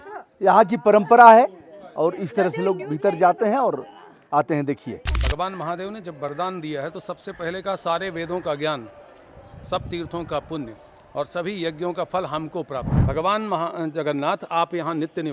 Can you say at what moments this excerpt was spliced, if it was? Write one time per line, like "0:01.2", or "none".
0:05.2
0:12.9